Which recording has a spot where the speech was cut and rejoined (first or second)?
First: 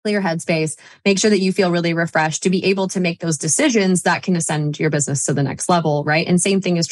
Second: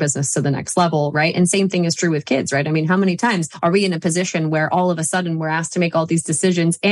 second